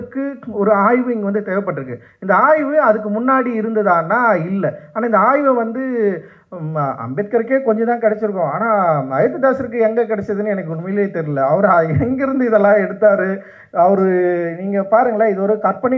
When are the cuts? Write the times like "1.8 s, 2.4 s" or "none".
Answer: none